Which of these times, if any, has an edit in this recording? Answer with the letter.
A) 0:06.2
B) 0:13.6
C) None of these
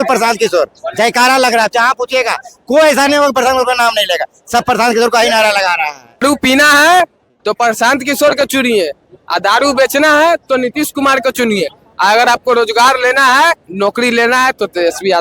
A